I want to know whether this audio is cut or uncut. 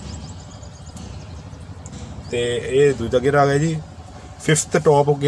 uncut